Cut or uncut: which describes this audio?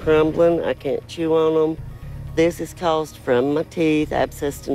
uncut